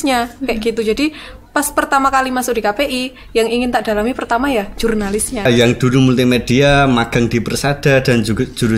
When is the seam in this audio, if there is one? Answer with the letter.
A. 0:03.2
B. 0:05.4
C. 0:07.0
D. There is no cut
B